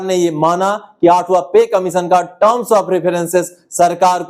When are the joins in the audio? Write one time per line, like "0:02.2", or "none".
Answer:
none

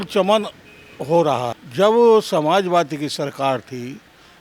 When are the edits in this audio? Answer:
0:01.6

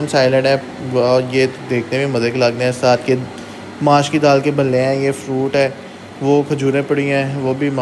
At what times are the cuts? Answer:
none

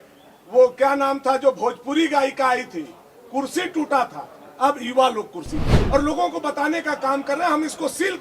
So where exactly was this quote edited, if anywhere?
0:05.7

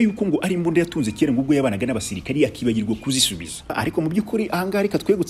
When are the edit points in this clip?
0:03.8

